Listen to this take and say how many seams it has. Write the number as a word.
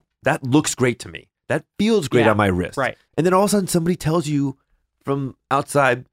one